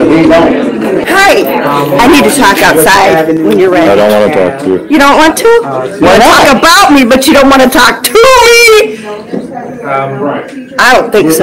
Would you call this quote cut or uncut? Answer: cut